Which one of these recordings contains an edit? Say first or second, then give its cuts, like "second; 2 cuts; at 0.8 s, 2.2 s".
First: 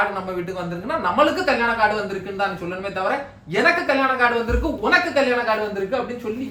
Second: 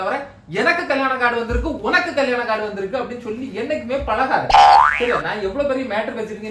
second; 2 cuts; at 4.5 s, 5.0 s